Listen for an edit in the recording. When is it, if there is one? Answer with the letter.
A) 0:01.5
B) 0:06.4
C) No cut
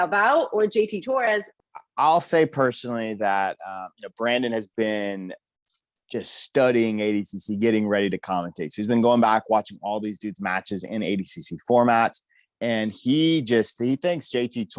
A